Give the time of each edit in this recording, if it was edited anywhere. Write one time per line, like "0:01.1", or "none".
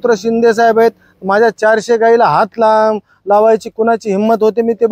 none